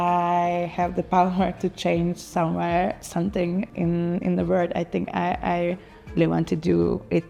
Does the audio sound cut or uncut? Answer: uncut